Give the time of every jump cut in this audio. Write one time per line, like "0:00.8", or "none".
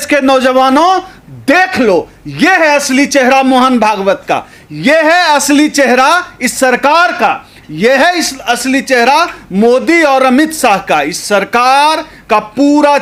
none